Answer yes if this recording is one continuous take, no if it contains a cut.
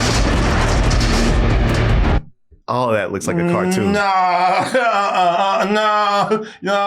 no